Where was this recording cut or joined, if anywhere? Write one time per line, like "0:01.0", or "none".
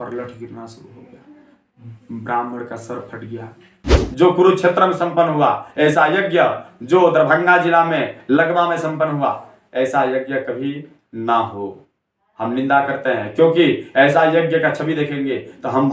0:04.0